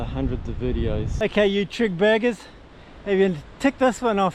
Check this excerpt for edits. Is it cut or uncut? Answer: cut